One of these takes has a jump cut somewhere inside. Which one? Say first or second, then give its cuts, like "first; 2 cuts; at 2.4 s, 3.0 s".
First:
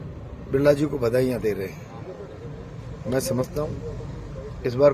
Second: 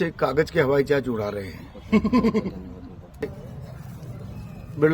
second; 1 cut; at 3.2 s